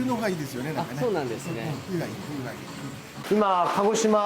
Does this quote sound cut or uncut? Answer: cut